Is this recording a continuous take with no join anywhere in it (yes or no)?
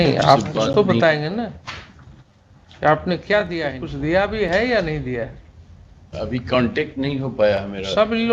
no